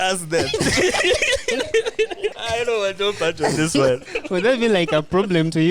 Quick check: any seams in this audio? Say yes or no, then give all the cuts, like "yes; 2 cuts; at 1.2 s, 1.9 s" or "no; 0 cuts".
yes; 2 cuts; at 2.3 s, 4.1 s